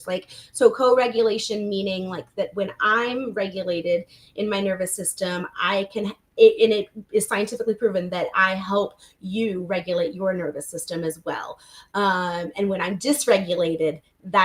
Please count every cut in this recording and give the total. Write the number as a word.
zero